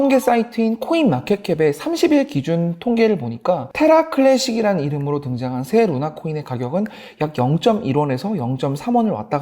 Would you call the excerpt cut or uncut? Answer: cut